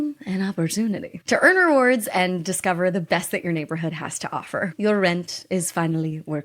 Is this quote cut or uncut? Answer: cut